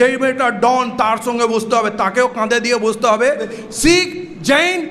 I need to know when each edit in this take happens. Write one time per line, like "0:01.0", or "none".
0:03.6